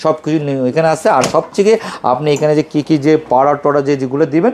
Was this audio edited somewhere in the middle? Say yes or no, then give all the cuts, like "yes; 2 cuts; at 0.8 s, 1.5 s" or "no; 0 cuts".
no; 0 cuts